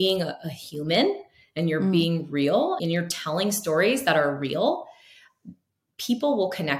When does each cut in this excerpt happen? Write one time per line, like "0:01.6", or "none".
0:02.8